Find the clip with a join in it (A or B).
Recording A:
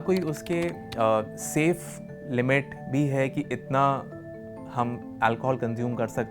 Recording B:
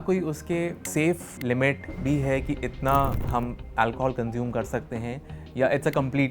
B